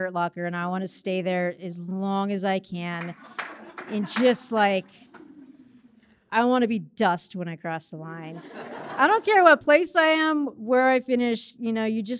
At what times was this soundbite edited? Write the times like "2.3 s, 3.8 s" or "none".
none